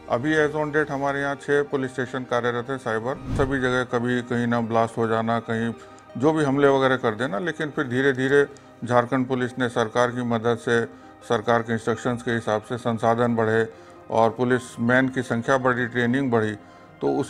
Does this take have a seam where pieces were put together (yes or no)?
yes